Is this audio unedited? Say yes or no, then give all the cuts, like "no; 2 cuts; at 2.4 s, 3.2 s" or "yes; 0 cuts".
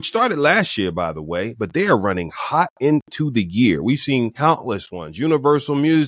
no; 1 cut; at 4.3 s